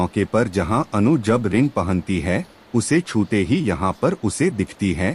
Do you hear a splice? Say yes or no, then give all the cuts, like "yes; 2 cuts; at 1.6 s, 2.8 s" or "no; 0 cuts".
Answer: no; 0 cuts